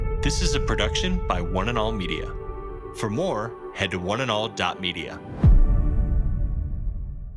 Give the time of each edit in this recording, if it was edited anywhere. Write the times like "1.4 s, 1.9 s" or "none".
none

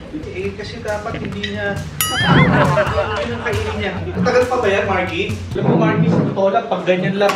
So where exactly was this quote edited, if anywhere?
5.4 s

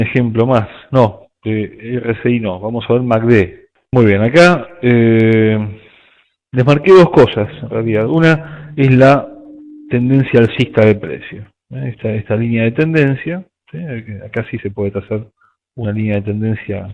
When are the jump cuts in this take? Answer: 6.1 s

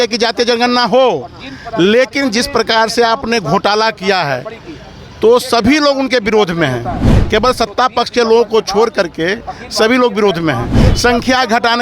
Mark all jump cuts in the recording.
10.8 s

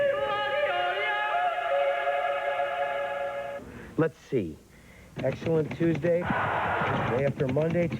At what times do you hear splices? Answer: 3.8 s

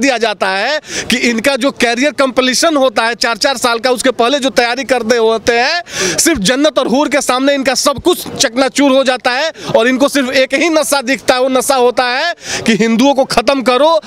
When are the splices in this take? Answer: none

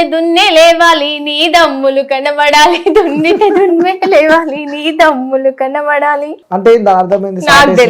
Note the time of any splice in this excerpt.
6.4 s

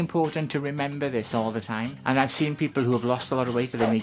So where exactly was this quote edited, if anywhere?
1.9 s

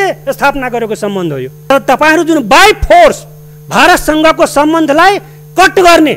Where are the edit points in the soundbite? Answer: 1.7 s

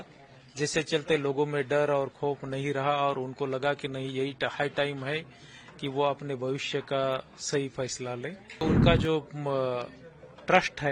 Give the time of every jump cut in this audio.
8.6 s

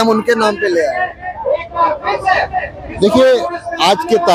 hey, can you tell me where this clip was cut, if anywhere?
none

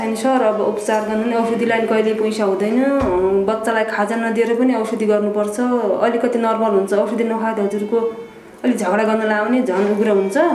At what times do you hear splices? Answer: none

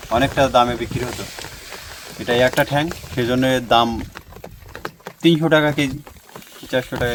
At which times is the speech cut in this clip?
none

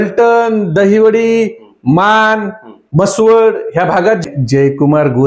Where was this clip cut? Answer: 4.2 s

